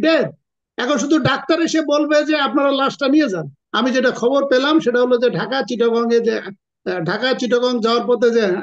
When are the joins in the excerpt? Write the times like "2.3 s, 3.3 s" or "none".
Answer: 3.6 s